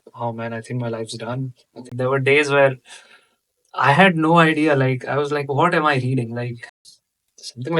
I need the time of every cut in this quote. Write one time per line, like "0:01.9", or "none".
0:01.9
0:06.7